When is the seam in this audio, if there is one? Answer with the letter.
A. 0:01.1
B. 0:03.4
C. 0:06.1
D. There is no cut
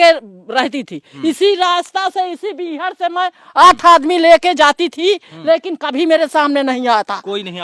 A